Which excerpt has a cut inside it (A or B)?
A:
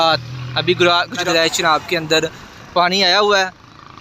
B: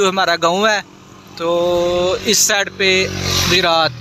A